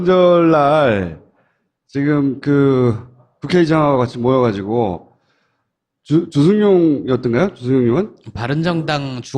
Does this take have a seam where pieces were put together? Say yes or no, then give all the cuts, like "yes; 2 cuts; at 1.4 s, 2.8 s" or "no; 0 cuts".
yes; 1 cut; at 3.0 s